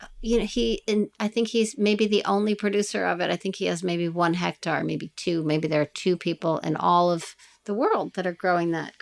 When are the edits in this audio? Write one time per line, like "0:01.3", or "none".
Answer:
none